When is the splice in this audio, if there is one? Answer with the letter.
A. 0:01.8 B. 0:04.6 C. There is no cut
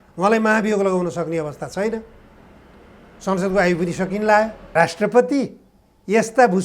B